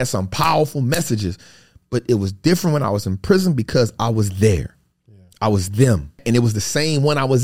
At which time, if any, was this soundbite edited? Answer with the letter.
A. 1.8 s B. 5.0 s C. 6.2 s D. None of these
C